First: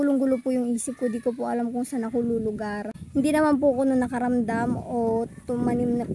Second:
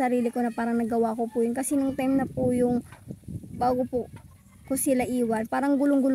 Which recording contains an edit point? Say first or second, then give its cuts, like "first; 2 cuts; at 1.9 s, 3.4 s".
first; 1 cut; at 3.0 s